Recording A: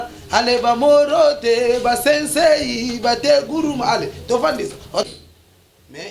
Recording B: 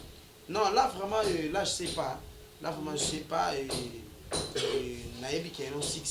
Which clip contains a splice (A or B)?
A